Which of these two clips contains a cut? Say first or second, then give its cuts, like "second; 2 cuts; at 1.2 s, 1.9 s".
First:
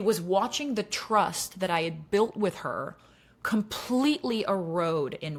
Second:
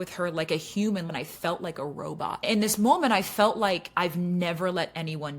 second; 2 cuts; at 1.1 s, 2.5 s